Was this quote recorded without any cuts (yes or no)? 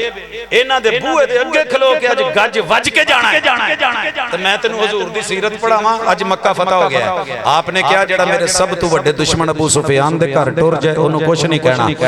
yes